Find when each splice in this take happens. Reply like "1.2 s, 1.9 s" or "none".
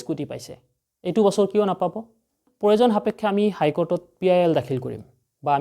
2.4 s